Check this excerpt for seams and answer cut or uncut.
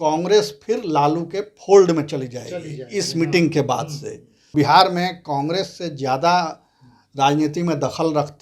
cut